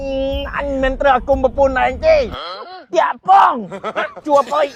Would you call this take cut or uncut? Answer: uncut